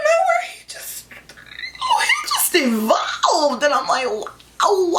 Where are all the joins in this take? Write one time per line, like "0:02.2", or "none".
none